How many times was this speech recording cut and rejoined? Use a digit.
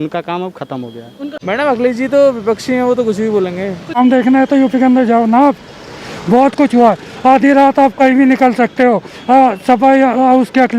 2